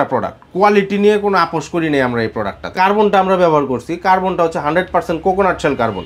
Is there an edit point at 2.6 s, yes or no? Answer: yes